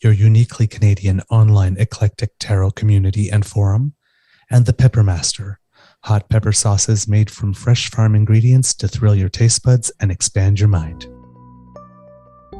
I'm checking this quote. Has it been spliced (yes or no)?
yes